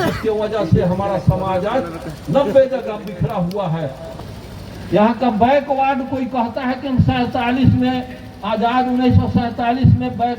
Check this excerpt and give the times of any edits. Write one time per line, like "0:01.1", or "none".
0:04.0